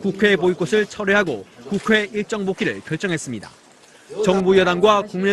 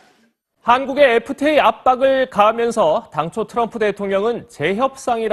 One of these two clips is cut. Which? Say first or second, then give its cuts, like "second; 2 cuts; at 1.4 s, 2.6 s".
first; 1 cut; at 2.6 s